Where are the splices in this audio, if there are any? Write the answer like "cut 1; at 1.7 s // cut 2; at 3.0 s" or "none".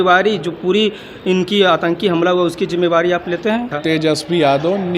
cut 1; at 3.7 s